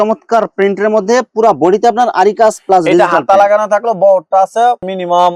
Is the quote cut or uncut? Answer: uncut